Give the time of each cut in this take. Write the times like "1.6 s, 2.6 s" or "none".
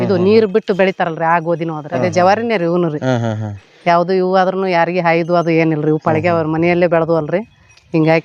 1.9 s